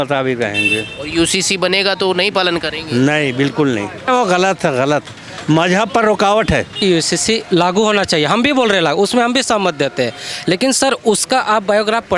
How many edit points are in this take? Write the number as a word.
two